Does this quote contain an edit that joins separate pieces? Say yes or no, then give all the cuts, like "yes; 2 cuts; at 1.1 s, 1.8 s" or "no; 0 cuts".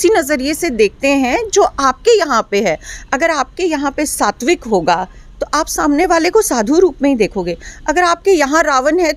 no; 0 cuts